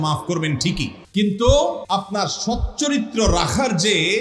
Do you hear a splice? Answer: yes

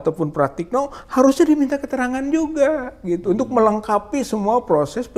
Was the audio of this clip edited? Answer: no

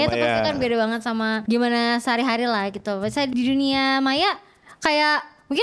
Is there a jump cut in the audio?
yes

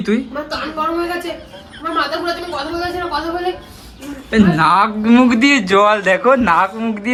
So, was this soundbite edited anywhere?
no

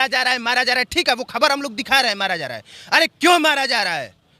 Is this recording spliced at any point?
no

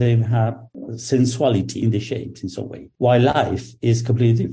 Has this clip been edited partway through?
yes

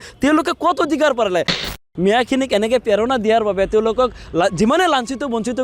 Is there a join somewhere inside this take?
yes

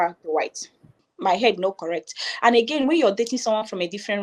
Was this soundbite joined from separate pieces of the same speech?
yes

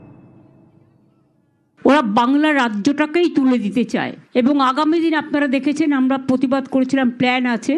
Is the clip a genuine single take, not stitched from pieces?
no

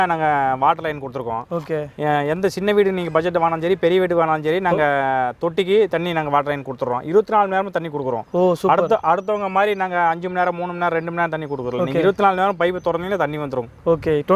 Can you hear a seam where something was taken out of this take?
no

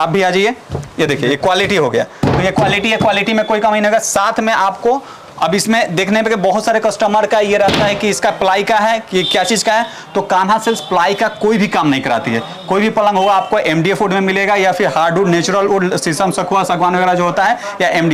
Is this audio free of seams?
yes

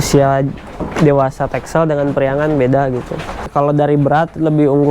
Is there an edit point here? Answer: yes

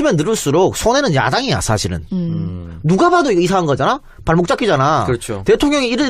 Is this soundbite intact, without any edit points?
yes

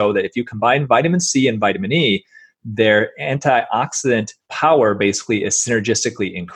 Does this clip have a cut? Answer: yes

